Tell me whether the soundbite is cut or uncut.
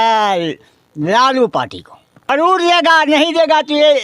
cut